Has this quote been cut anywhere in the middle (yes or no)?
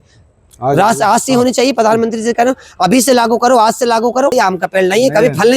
yes